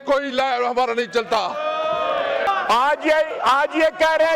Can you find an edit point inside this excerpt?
yes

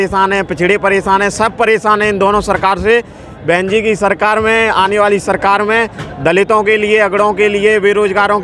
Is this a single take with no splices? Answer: yes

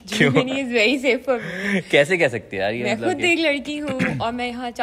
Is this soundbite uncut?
yes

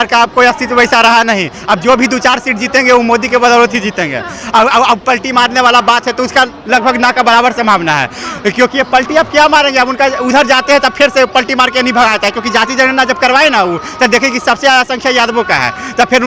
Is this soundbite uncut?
yes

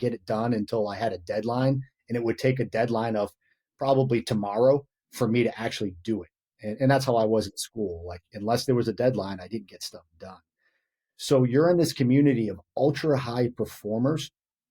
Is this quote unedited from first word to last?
yes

